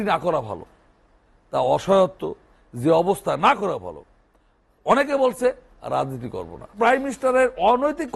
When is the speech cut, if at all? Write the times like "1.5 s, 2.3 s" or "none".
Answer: 6.7 s